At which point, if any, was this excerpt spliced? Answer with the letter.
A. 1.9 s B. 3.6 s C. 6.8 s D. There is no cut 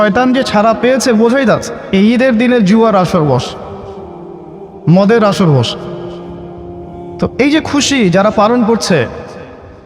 A